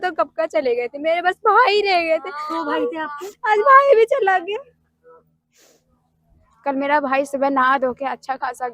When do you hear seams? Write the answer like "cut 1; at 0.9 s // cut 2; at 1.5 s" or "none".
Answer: cut 1; at 5.7 s